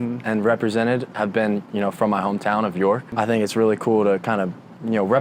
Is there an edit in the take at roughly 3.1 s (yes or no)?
yes